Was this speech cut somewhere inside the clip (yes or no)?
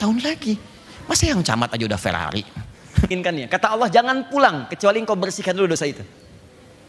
yes